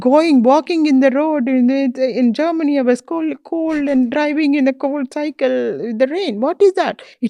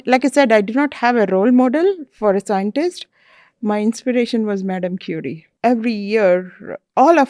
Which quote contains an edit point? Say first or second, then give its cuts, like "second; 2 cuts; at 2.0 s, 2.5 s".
second; 1 cut; at 5.5 s